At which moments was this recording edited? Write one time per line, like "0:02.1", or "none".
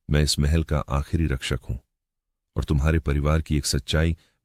none